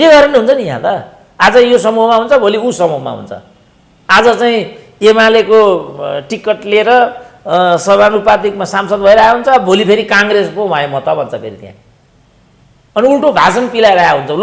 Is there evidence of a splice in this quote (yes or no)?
no